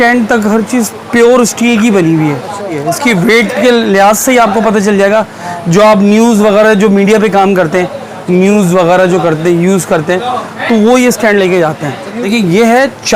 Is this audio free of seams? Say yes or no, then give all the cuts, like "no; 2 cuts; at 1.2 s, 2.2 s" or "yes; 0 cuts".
no; 2 cuts; at 2.8 s, 12.1 s